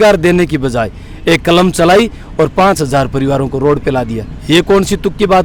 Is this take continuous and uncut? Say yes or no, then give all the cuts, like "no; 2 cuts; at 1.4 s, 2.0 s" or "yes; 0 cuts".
yes; 0 cuts